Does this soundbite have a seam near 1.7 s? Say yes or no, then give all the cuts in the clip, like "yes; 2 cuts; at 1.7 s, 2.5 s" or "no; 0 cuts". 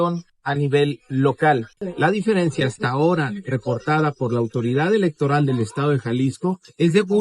yes; 1 cut; at 1.7 s